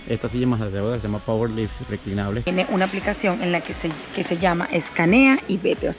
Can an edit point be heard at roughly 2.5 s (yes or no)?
yes